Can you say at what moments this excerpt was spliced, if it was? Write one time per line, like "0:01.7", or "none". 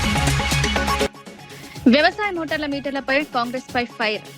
0:01.1

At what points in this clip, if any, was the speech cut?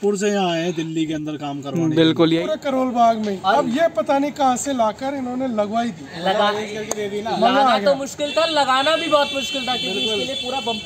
0:02.4

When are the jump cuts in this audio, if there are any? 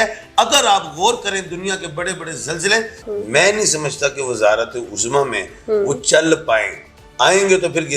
0:03.0

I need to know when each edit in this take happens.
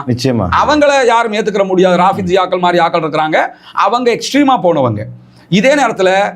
none

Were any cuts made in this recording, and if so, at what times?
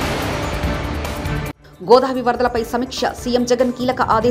0:01.5

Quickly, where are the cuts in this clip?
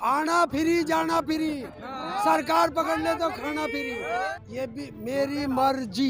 0:04.3

